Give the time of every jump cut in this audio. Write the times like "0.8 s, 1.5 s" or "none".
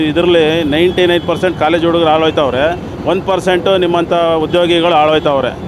none